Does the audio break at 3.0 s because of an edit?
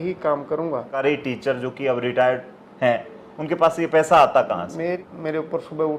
no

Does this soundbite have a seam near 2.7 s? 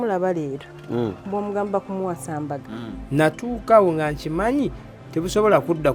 yes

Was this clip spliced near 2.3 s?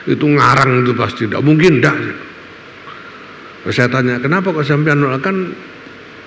no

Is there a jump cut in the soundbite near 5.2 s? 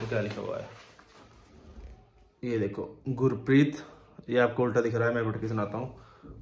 no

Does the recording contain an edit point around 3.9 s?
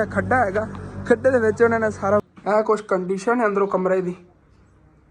no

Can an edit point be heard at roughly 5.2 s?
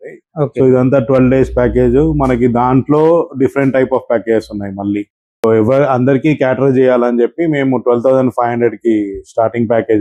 no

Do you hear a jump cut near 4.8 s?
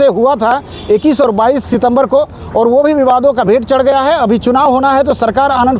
no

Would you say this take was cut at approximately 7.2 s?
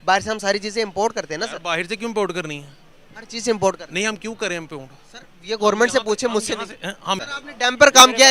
yes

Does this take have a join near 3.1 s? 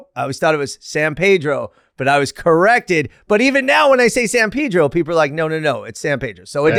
no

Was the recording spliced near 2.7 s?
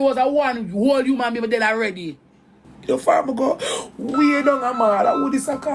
yes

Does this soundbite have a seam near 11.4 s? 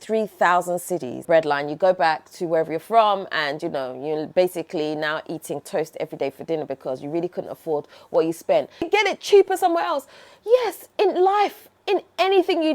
no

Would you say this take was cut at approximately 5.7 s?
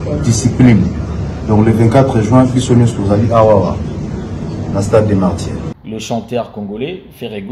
yes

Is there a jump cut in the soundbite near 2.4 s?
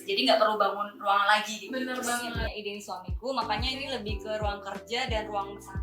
yes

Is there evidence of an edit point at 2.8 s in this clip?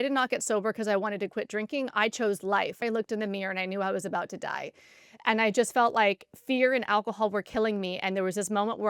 yes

